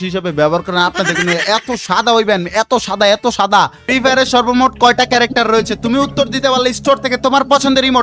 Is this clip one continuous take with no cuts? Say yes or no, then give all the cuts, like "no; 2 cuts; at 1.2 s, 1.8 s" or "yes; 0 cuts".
no; 1 cut; at 3.8 s